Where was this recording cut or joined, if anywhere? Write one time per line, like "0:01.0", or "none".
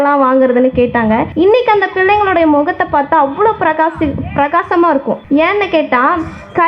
0:01.3
0:05.2